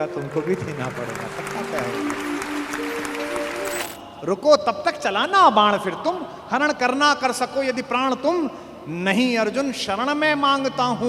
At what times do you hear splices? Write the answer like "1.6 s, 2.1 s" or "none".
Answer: 3.8 s